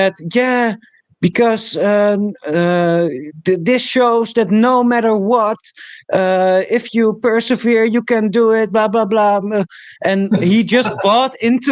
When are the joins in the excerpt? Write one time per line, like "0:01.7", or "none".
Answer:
none